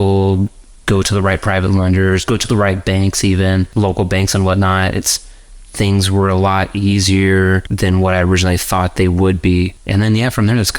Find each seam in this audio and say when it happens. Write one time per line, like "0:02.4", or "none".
0:03.7
0:07.7
0:09.8